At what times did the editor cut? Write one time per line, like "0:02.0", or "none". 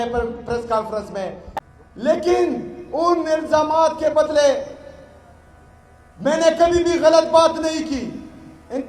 0:01.7